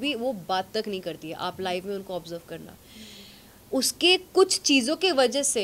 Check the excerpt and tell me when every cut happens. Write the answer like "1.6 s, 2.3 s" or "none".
none